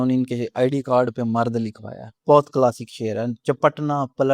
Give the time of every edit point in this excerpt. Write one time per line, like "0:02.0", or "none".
0:02.1